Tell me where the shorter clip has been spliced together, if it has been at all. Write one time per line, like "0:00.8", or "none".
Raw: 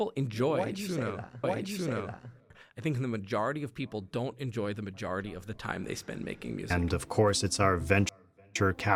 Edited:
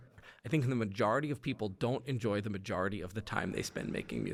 none